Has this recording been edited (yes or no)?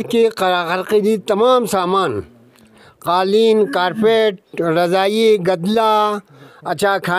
no